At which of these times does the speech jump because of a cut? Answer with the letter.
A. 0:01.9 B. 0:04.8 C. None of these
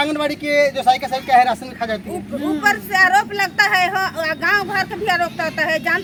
C